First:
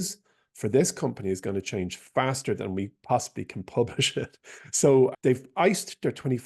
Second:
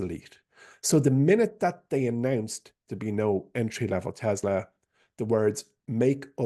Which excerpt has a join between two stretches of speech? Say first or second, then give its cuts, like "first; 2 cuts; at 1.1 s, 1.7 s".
first; 1 cut; at 5.1 s